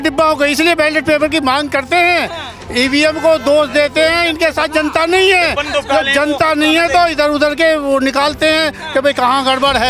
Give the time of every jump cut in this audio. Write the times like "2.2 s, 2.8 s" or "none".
none